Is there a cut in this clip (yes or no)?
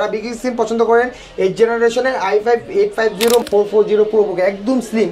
yes